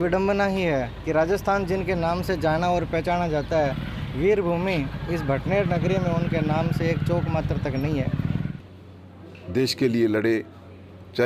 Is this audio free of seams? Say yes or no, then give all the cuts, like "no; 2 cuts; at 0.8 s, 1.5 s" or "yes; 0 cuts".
no; 1 cut; at 8.5 s